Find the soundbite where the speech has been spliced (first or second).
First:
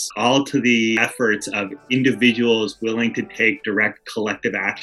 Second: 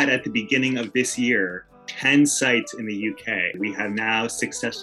second